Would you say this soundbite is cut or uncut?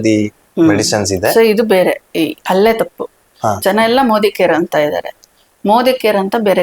uncut